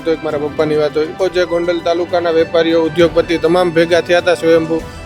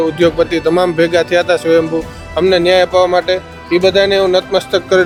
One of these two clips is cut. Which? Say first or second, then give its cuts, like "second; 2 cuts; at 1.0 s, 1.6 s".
first; 1 cut; at 1.2 s